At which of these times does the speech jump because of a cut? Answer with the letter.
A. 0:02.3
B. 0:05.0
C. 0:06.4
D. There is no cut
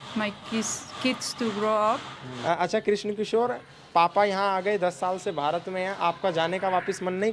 A